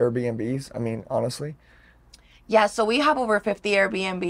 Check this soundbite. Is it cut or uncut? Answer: uncut